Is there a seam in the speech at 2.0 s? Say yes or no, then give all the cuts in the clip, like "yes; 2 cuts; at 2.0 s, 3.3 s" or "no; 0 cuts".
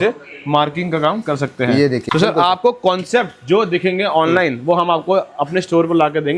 yes; 1 cut; at 2.0 s